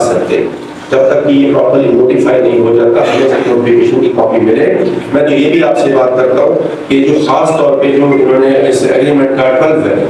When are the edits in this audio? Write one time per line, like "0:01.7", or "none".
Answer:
none